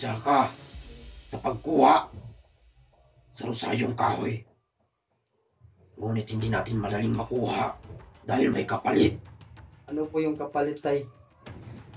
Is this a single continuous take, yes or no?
yes